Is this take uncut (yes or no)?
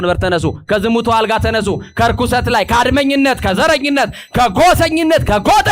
yes